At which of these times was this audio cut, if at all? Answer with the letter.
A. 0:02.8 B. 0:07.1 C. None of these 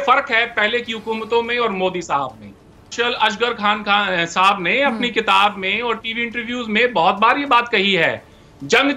A